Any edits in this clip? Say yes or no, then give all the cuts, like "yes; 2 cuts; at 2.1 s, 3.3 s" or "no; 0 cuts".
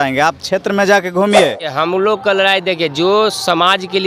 yes; 1 cut; at 1.7 s